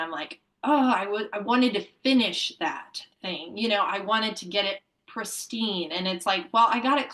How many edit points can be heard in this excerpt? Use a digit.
0